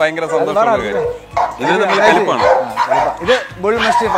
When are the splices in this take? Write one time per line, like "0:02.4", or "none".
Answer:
0:01.3
0:03.2